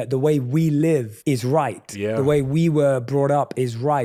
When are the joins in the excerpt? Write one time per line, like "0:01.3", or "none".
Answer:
none

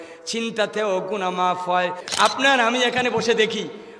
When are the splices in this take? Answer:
0:02.0

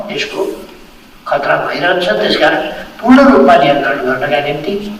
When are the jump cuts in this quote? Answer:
none

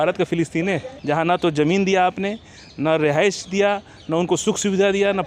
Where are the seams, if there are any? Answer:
0:00.9

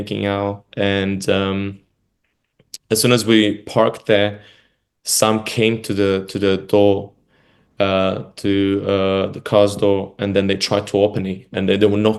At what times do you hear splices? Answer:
none

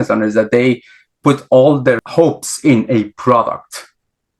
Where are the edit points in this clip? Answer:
0:02.0

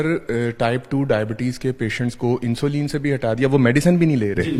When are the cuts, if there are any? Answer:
none

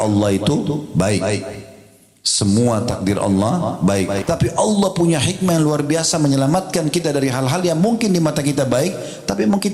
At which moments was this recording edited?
0:04.2

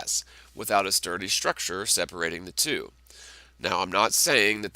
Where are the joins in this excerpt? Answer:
0:02.4

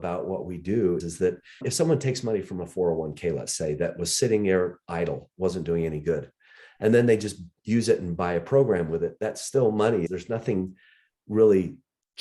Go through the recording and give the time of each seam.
none

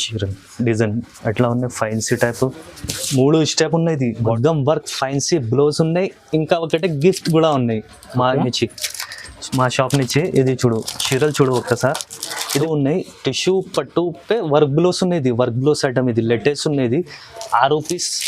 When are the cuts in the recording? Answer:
0:04.2
0:12.4

